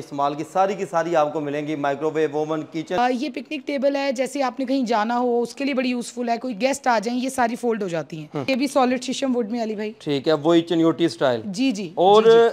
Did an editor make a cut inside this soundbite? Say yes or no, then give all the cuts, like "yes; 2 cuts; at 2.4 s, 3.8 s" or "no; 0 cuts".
yes; 2 cuts; at 3.0 s, 8.5 s